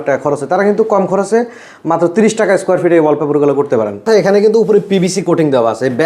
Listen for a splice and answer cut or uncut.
cut